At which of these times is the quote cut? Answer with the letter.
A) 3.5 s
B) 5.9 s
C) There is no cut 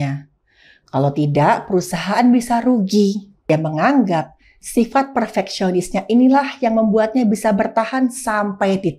A